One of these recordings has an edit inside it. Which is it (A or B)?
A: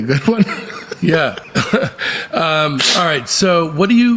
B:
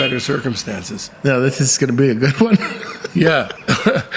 B